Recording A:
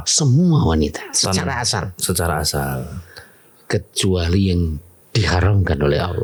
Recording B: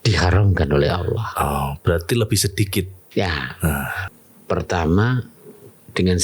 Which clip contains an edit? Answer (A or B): B